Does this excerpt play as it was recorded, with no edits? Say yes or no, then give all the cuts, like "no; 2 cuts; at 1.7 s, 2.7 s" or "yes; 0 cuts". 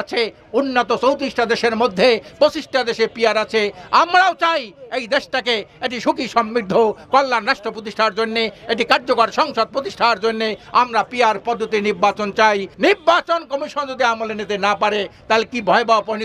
no; 1 cut; at 12.7 s